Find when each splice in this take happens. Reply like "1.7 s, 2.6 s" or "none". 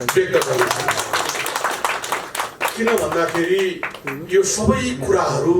none